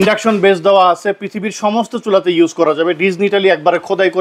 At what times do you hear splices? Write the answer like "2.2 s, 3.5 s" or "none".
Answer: none